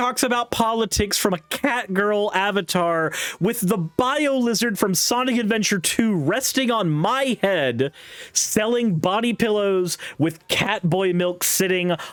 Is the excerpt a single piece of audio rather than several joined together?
yes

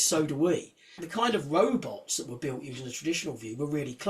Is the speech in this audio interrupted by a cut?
yes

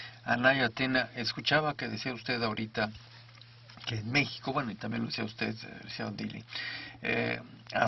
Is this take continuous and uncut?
yes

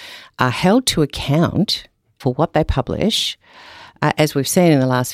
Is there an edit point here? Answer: yes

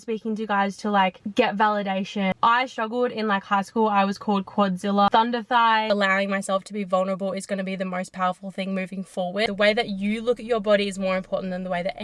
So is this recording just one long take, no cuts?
no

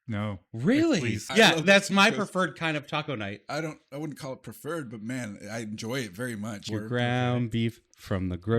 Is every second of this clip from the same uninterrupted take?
no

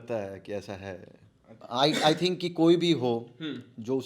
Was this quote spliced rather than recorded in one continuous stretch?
yes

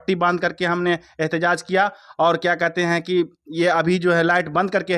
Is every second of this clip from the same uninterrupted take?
yes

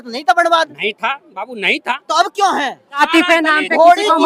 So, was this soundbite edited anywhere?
yes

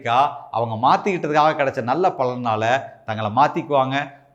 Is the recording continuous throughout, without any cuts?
yes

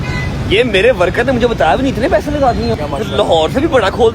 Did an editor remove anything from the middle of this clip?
yes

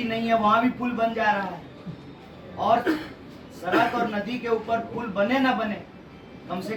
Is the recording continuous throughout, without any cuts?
yes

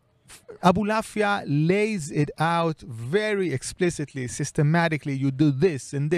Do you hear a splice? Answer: no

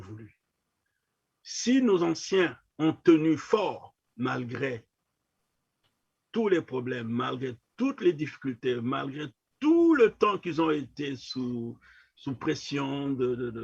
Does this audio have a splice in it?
no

